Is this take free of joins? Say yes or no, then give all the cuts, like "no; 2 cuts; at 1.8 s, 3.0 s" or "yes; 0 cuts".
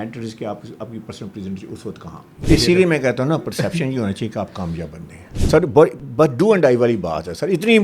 no; 2 cuts; at 2.5 s, 5.2 s